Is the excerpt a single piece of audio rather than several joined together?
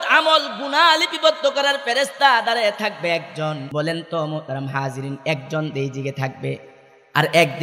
no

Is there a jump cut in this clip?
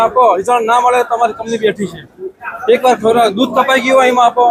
no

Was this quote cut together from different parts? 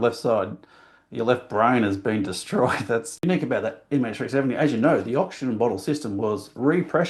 yes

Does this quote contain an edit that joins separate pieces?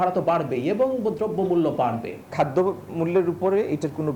yes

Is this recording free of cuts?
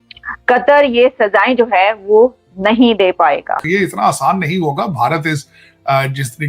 no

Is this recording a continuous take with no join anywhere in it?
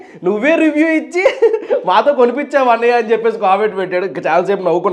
yes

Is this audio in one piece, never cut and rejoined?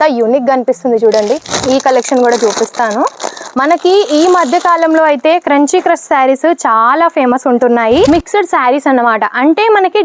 no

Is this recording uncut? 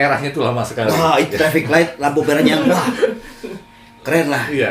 yes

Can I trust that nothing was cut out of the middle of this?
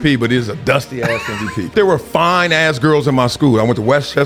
no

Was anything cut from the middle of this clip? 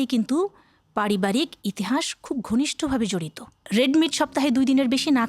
yes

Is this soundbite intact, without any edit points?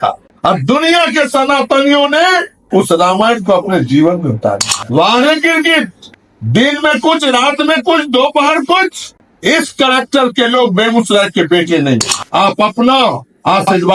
no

